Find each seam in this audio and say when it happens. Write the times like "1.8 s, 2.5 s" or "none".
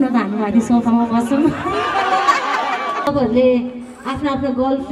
3.1 s